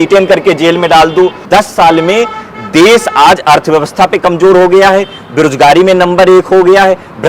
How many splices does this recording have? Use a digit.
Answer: 1